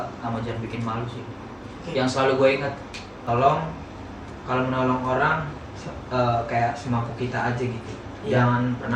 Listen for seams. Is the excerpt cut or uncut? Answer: cut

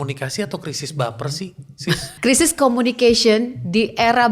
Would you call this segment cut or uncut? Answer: cut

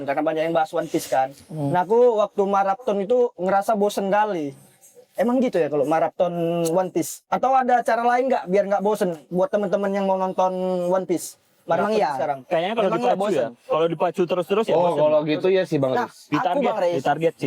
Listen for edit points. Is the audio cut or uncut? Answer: uncut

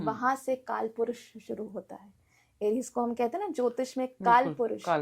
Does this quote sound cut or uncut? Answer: uncut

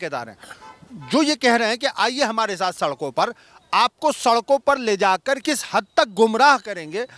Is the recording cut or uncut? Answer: cut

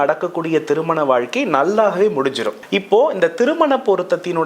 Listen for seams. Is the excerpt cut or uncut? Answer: cut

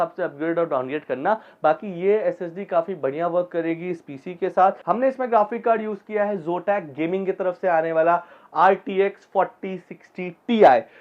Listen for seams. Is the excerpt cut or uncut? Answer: cut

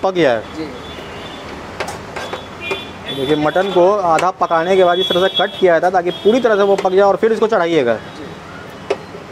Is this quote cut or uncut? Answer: uncut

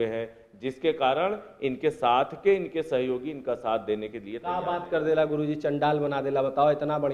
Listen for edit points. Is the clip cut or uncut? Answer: uncut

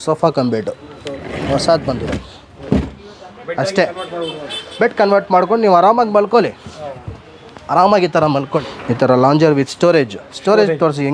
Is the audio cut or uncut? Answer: cut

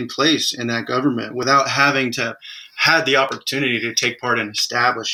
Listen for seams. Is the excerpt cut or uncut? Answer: uncut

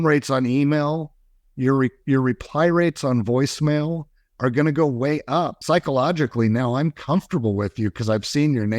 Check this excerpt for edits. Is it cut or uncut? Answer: cut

